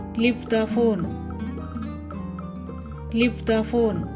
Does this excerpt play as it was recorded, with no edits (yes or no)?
yes